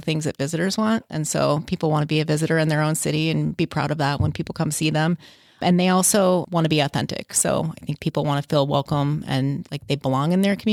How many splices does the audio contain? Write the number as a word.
zero